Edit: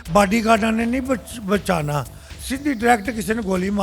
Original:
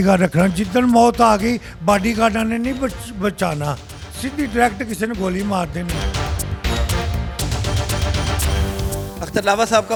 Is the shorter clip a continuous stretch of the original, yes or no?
yes